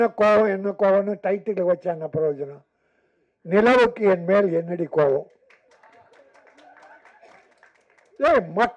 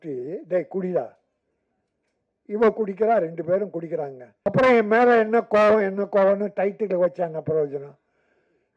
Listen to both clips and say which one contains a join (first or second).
second